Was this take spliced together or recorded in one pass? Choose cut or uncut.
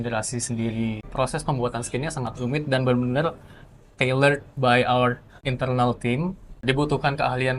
cut